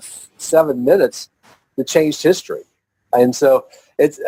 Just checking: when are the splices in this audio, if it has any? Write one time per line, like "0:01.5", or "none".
none